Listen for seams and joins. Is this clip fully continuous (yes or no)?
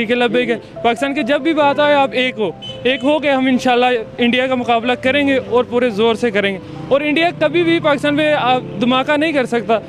yes